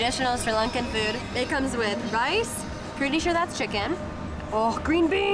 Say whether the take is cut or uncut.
uncut